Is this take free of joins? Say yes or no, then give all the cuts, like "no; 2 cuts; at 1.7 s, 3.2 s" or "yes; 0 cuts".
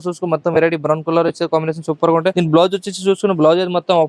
yes; 0 cuts